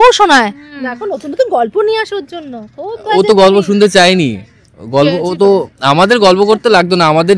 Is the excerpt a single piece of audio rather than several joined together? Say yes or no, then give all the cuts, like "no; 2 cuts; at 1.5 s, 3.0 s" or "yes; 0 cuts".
yes; 0 cuts